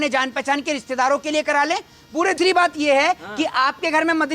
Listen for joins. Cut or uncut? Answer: cut